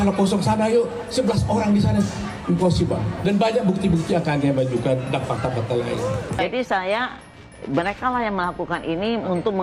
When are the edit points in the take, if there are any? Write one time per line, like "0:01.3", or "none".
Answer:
none